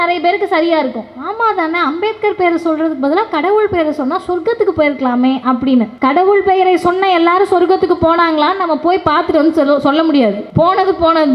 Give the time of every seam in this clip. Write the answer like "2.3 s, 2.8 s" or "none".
5.9 s, 10.4 s